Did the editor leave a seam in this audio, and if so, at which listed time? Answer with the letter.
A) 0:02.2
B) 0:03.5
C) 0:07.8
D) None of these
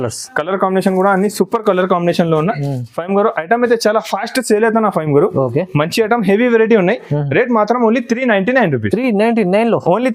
D